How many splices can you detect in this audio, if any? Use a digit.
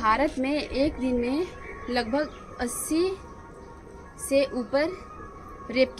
0